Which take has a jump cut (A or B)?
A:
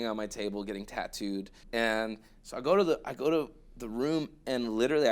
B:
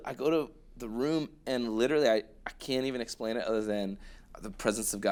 A